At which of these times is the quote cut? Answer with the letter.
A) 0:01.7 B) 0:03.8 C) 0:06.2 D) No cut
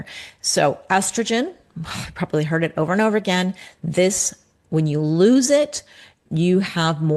C